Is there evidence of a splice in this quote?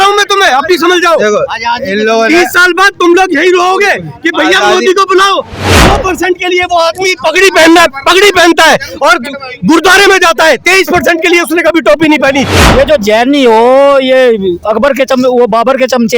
yes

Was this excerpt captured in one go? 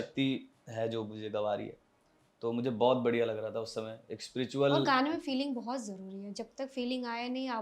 yes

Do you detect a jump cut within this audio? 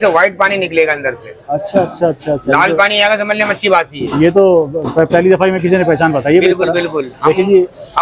no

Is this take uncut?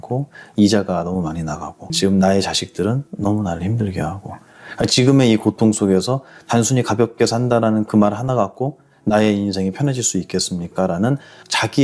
yes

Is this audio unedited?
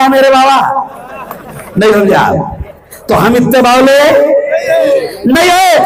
yes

